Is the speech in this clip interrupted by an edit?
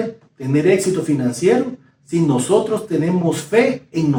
no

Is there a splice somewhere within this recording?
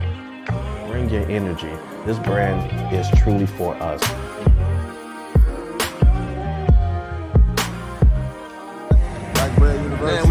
no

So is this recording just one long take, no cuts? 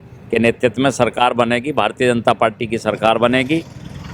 yes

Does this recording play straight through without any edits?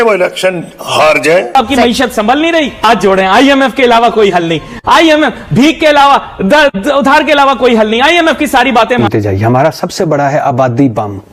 no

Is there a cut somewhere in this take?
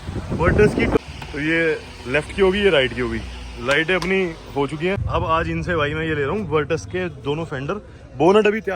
yes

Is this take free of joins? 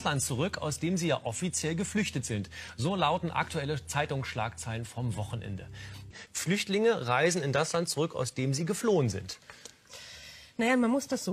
no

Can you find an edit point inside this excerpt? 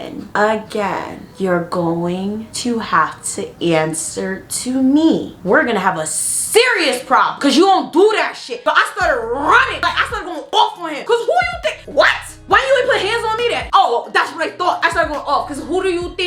yes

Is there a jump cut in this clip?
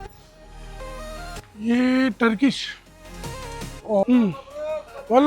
yes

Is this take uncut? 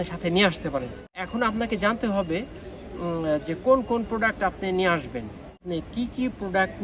no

